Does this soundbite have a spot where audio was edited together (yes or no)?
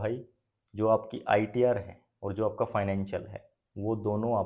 no